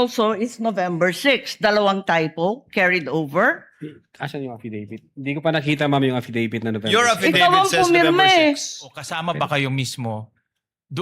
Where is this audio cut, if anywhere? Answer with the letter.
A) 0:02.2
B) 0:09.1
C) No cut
B